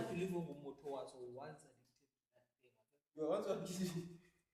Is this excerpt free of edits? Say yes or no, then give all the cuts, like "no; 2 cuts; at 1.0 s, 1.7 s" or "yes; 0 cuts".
yes; 0 cuts